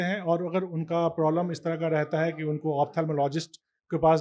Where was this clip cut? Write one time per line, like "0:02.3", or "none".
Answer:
none